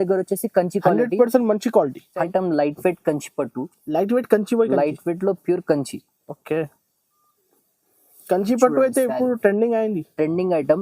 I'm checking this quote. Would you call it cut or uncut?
cut